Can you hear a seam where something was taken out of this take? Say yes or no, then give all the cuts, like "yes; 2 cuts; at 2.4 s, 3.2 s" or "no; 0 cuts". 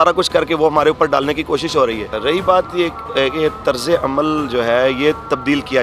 no; 0 cuts